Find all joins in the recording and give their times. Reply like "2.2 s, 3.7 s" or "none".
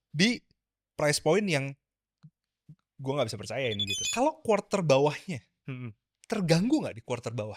3.9 s